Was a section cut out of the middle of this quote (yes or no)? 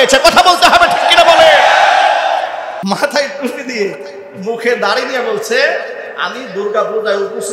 yes